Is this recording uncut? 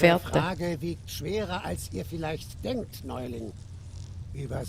yes; 0 cuts

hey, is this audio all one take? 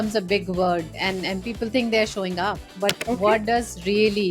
no; 1 cut; at 2.6 s

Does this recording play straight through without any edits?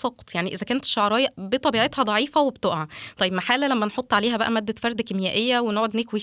yes; 0 cuts

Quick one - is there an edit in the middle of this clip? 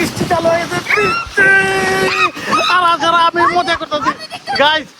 no; 0 cuts

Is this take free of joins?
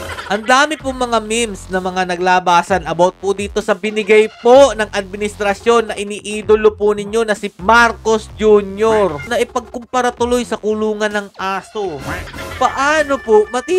no; 2 cuts; at 9.3 s, 12.3 s

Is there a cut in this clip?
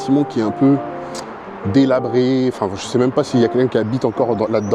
no; 0 cuts

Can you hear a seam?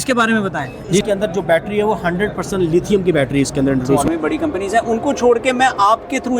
yes; 2 cuts; at 1.0 s, 4.0 s

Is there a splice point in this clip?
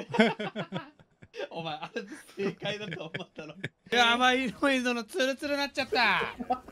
yes; 1 cut; at 3.8 s

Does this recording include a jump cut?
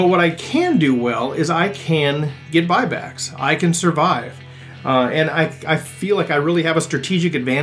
no; 0 cuts

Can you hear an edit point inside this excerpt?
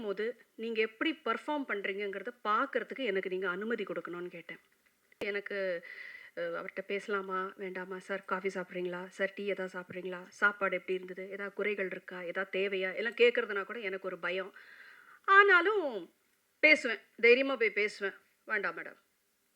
yes; 1 cut; at 5.2 s

